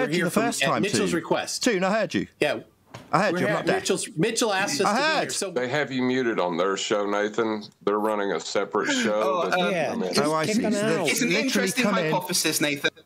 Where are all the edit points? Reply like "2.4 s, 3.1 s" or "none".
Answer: 5.4 s